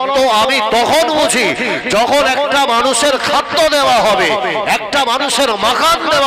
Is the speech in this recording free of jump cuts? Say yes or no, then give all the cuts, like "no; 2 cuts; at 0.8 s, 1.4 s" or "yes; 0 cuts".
yes; 0 cuts